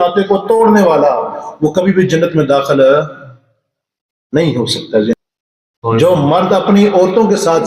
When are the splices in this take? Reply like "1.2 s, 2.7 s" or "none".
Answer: 5.1 s